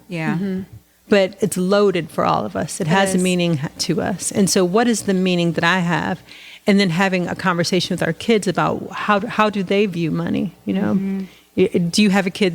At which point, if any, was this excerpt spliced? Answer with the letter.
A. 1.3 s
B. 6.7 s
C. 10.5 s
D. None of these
A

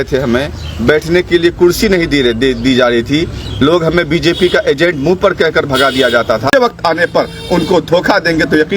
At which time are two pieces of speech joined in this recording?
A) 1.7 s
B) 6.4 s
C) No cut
B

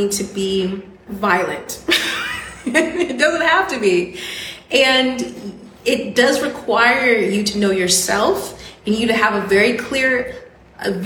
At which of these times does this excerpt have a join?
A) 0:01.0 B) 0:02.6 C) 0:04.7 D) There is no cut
A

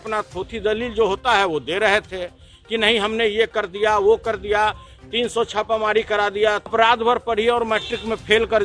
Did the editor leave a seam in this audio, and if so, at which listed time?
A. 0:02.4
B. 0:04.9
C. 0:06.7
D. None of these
C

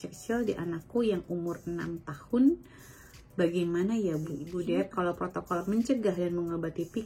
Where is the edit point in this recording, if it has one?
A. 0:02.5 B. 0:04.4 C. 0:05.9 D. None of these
B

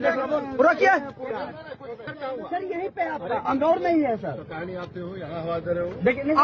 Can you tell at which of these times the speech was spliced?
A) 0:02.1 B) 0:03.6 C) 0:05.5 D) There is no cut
A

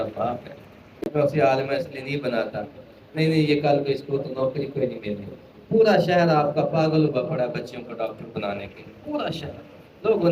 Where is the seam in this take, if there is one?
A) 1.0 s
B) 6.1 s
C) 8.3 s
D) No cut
A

